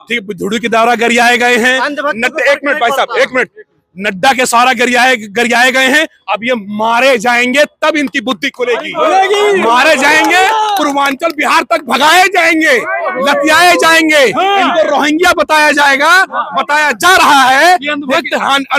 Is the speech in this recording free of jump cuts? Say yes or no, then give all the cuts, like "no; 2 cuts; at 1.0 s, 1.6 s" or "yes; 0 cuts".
yes; 0 cuts